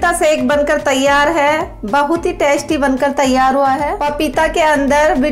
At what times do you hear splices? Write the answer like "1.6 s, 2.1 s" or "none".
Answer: 3.9 s